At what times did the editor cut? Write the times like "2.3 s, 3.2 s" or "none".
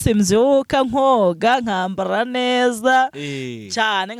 none